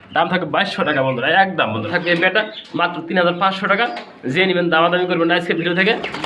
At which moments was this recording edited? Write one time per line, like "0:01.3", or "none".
0:01.9